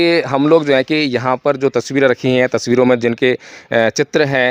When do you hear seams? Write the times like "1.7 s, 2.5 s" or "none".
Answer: none